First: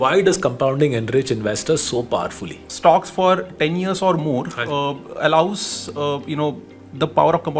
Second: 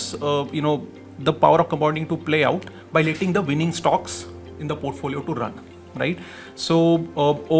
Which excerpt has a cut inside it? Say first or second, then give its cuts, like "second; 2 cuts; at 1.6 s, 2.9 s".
first; 1 cut; at 2.6 s